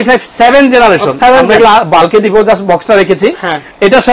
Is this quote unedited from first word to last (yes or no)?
yes